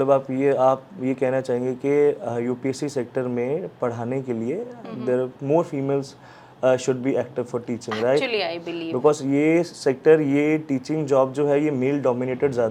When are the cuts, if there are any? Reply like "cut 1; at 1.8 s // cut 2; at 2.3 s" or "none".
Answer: none